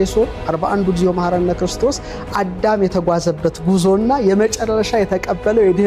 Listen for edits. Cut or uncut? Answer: uncut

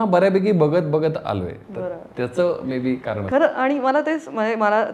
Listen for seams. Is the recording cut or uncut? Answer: uncut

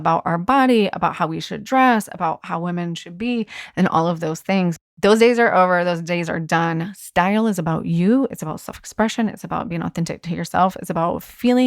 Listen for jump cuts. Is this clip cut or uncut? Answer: cut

